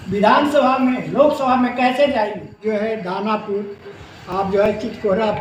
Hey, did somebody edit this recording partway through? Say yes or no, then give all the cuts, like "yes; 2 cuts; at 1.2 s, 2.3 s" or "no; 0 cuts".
yes; 1 cut; at 2.5 s